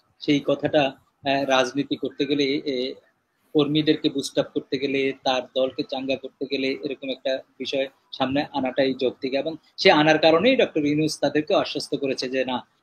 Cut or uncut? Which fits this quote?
uncut